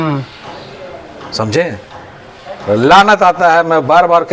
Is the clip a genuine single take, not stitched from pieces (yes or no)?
yes